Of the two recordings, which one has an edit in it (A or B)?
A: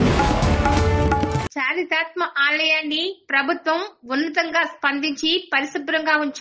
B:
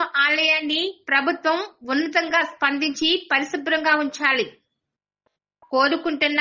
A